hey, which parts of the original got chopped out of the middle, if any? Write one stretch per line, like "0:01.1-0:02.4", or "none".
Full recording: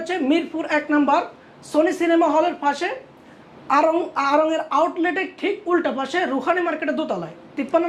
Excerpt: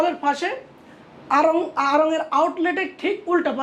none